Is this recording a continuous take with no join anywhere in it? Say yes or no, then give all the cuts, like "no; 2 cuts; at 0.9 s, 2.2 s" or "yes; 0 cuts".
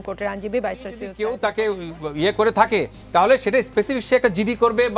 no; 1 cut; at 1.1 s